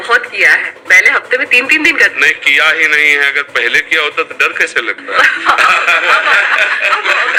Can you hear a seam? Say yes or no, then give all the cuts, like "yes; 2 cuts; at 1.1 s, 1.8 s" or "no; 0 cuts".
no; 0 cuts